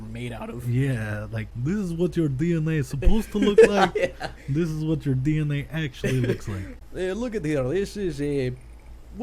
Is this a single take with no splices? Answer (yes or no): no